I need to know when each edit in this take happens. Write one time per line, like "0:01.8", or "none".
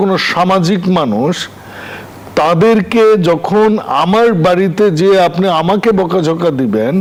none